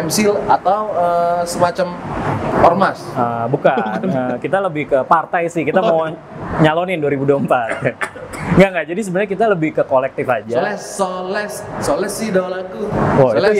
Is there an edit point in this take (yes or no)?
no